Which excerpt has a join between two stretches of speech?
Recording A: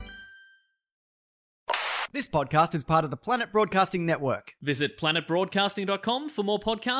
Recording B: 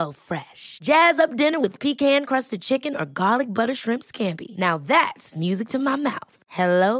A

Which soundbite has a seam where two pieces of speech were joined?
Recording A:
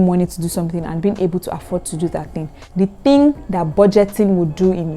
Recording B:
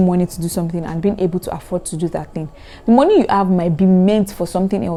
A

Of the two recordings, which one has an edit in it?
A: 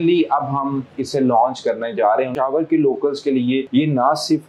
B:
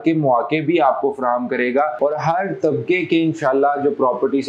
A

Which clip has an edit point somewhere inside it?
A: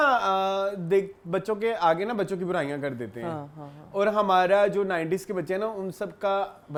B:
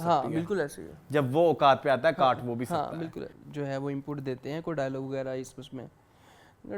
B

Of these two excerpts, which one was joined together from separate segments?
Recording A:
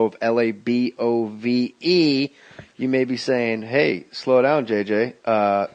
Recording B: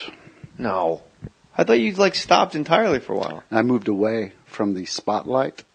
B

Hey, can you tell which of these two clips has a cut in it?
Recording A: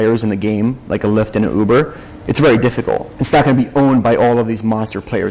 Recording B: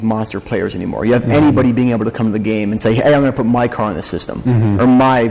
A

